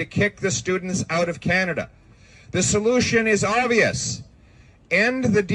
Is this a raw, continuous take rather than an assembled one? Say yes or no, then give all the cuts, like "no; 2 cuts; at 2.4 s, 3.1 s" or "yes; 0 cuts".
yes; 0 cuts